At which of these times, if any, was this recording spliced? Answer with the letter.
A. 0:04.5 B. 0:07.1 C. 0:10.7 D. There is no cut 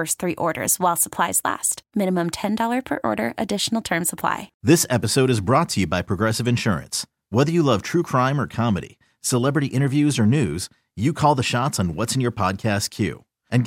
A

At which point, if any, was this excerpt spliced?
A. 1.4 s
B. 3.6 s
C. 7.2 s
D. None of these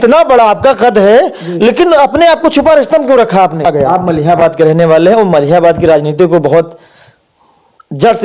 B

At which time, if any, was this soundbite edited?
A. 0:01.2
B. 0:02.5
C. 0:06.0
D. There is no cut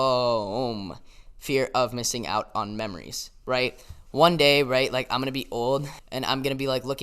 C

